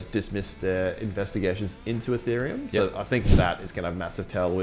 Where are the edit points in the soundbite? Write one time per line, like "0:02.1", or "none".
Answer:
none

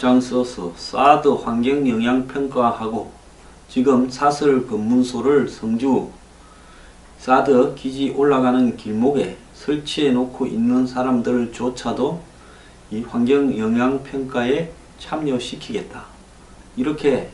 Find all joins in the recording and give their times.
none

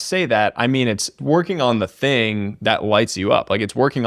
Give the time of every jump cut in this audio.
0:01.2

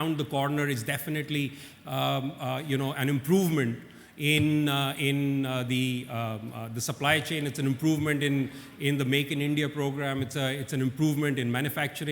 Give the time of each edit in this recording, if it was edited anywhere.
none

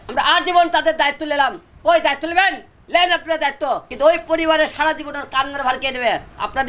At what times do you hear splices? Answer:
0:03.9

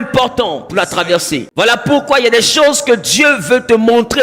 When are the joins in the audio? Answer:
0:01.5

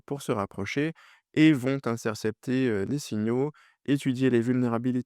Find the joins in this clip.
none

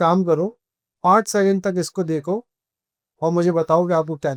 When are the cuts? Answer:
none

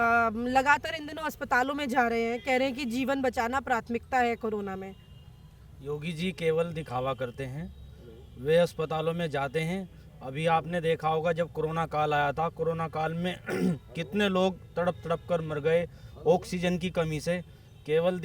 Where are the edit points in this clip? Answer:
none

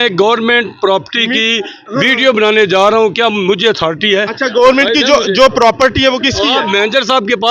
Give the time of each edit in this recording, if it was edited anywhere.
none

